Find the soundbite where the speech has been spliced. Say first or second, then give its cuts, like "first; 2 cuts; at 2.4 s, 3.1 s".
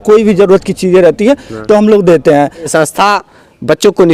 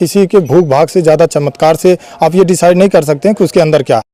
first; 1 cut; at 2.7 s